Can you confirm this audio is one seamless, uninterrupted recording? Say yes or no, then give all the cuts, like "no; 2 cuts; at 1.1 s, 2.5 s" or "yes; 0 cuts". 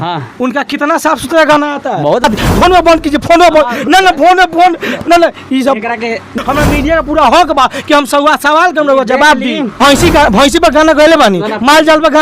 no; 3 cuts; at 2.2 s, 6.3 s, 9.8 s